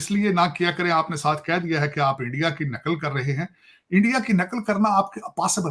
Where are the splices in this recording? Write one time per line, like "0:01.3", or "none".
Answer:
none